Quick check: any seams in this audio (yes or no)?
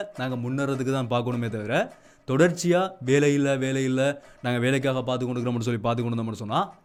no